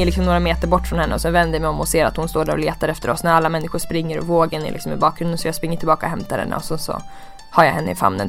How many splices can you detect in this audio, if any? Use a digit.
0